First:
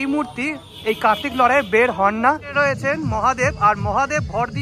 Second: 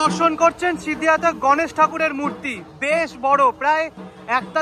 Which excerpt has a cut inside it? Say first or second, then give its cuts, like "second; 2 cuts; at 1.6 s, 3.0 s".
first; 1 cut; at 2.5 s